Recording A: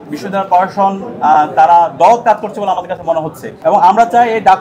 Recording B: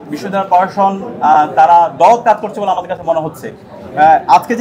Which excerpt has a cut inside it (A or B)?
A